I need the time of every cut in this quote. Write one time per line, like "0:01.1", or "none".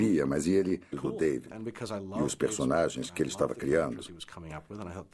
none